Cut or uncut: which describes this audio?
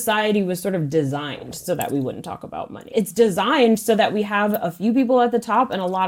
cut